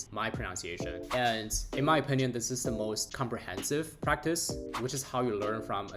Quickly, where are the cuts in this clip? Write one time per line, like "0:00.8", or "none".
0:00.9
0:04.5